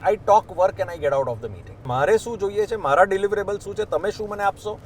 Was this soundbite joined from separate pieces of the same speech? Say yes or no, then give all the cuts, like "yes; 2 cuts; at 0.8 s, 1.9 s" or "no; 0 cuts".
yes; 1 cut; at 1.7 s